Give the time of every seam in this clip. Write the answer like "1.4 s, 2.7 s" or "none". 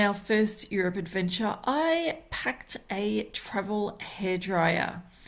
none